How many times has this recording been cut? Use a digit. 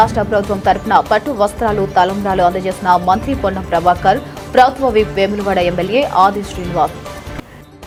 0